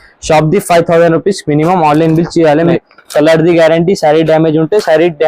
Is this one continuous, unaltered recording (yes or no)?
no